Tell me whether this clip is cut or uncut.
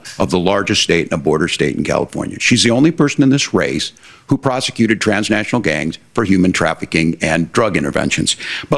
uncut